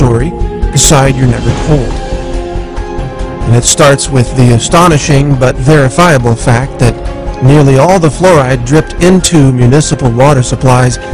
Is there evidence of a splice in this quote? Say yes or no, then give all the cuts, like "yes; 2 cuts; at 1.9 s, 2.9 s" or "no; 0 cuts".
no; 0 cuts